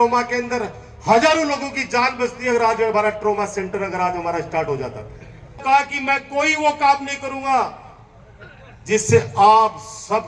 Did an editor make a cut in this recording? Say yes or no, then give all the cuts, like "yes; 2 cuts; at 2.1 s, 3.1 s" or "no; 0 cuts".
yes; 1 cut; at 5.6 s